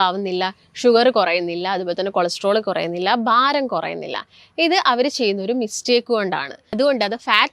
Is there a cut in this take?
yes; 1 cut; at 6.6 s

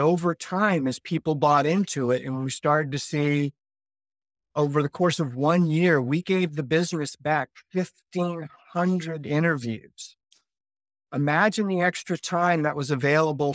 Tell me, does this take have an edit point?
no; 0 cuts

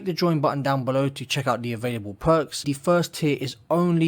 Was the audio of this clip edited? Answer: yes; 1 cut; at 2.6 s

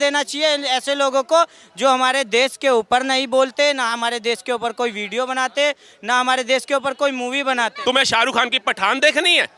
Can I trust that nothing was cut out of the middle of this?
no; 1 cut; at 7.7 s

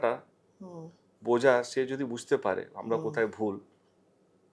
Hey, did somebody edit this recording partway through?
no; 0 cuts

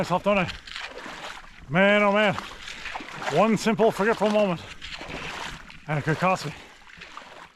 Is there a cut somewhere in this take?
no; 0 cuts

